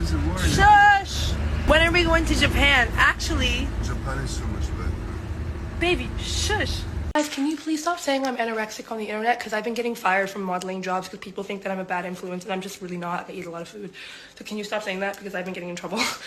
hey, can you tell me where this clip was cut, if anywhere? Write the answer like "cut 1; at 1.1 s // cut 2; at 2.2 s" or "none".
cut 1; at 1.7 s // cut 2; at 7.0 s